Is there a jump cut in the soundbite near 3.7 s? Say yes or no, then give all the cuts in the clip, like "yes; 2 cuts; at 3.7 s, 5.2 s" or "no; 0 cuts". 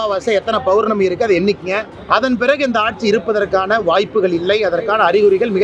no; 1 cut; at 1.9 s